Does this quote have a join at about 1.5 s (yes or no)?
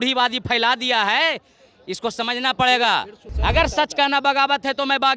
no